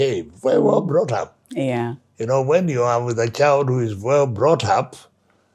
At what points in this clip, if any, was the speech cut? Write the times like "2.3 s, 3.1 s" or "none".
none

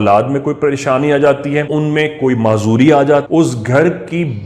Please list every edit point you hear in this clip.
1.7 s, 3.3 s

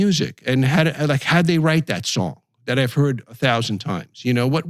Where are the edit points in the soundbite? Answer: none

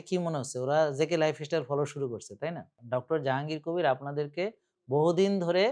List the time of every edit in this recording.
2.8 s

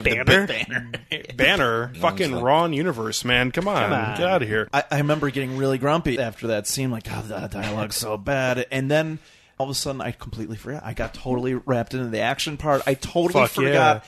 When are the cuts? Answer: 1.9 s, 4.7 s, 6.2 s, 9.6 s

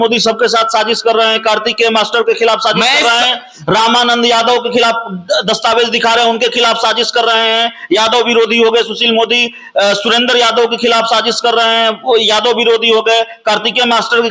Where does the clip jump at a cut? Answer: none

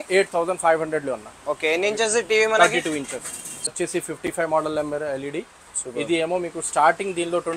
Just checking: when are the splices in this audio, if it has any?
3.7 s

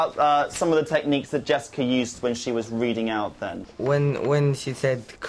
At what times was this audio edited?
3.7 s

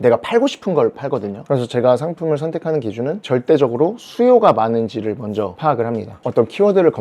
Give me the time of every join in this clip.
1.4 s, 6.1 s

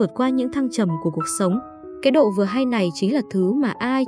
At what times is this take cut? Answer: 1.8 s

